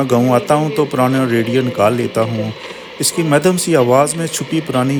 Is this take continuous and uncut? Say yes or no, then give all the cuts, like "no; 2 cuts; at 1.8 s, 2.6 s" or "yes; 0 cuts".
yes; 0 cuts